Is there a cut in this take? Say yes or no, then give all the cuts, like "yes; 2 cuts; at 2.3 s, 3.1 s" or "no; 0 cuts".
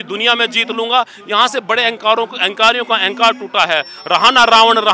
no; 0 cuts